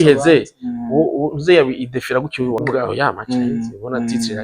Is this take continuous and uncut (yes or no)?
no